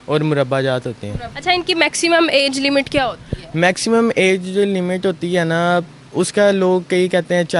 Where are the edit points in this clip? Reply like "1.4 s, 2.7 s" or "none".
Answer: none

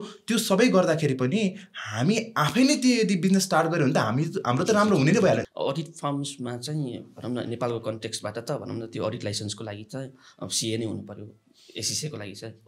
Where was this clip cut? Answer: 5.4 s

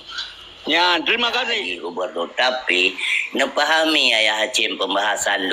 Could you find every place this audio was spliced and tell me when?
1.7 s

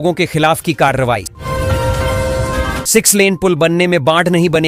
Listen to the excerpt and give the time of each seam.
1.3 s, 2.8 s

